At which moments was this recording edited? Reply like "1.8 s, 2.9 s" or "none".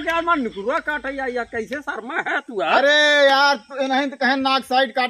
none